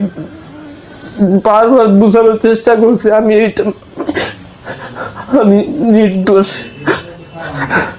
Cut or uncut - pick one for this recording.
uncut